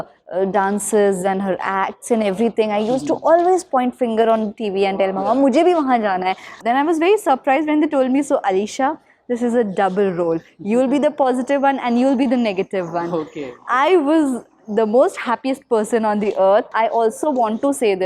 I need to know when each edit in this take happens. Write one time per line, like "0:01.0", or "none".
0:06.5
0:16.7